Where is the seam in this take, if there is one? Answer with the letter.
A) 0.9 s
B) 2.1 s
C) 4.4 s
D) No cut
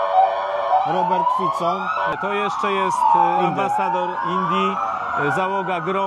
B